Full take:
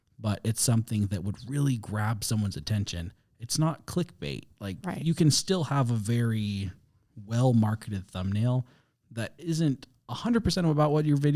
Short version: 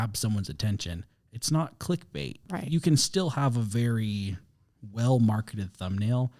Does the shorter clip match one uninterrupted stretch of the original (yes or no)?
no